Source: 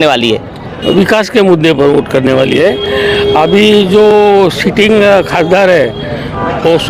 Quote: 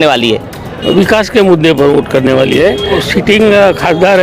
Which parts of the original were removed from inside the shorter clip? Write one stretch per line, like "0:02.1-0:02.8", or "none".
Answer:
0:03.0-0:04.5